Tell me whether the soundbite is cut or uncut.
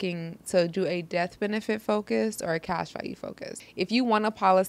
cut